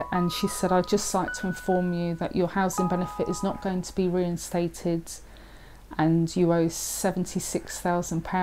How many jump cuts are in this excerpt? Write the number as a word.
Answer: zero